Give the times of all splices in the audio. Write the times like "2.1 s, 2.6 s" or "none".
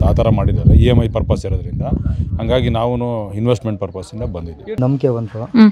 4.8 s